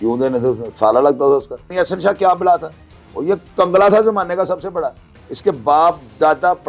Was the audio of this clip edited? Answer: yes; 1 cut; at 1.7 s

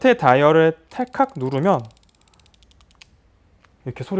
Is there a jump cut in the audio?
no; 0 cuts

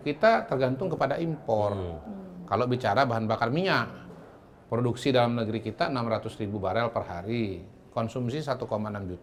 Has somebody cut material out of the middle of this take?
no; 0 cuts

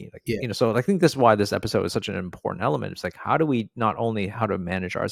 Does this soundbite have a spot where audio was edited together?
no; 0 cuts

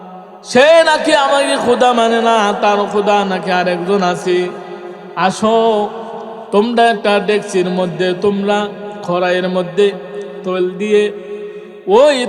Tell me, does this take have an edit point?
yes; 1 cut; at 10.4 s

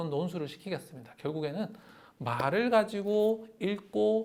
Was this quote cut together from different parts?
no; 0 cuts

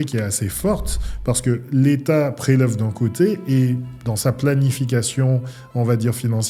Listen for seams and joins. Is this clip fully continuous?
yes; 0 cuts

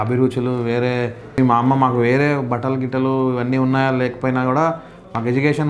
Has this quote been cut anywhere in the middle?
yes; 1 cut; at 1.4 s

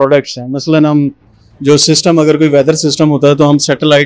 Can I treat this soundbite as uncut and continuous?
yes; 0 cuts

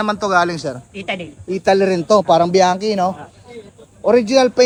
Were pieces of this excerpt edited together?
no; 0 cuts

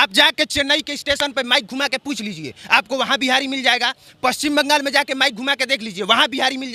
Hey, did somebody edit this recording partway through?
no; 0 cuts

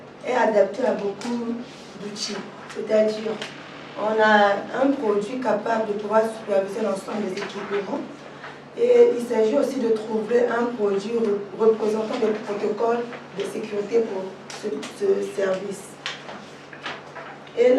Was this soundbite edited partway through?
no; 0 cuts

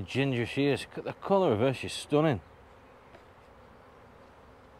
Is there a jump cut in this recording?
no; 0 cuts

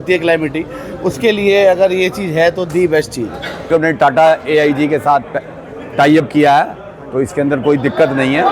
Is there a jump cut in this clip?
yes; 1 cut; at 3.7 s

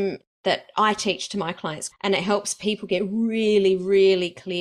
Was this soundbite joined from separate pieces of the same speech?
yes; 1 cut; at 1.8 s

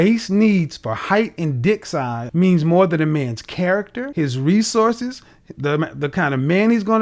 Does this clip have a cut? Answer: yes; 2 cuts; at 2.2 s, 4.0 s

